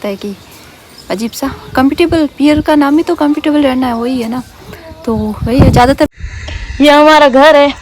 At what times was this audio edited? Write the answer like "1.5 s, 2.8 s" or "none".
6.1 s